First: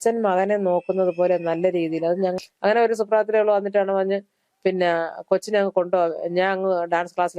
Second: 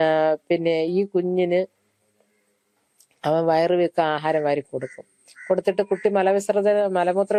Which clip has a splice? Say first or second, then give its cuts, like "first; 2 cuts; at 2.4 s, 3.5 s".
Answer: first; 1 cut; at 2.4 s